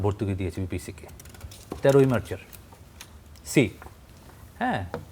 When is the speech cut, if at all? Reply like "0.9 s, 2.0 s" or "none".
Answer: none

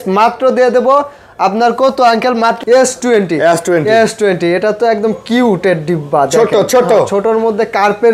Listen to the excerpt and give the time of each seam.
2.6 s

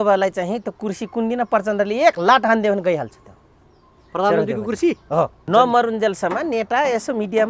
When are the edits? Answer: 5.4 s

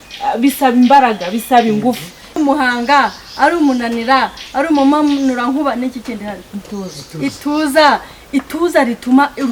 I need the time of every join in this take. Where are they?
2.4 s

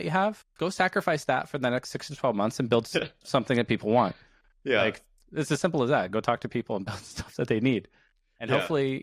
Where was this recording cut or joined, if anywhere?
none

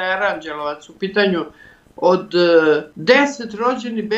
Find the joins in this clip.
2.9 s

